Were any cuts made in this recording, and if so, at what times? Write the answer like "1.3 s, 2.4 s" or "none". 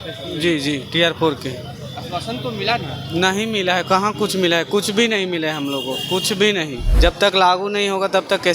6.8 s